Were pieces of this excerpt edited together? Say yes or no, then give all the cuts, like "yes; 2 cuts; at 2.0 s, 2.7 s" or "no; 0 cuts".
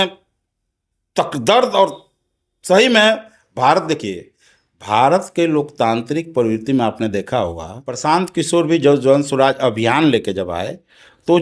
yes; 1 cut; at 7.9 s